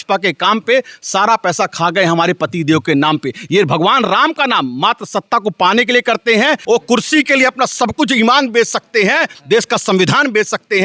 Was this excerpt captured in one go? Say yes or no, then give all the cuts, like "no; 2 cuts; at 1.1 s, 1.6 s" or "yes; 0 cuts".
no; 1 cut; at 6.6 s